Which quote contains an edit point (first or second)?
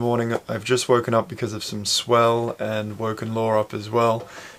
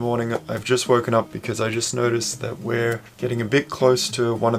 second